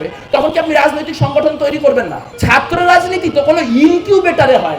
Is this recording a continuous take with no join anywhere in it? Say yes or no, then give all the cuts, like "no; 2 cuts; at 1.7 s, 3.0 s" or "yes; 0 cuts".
no; 1 cut; at 2.3 s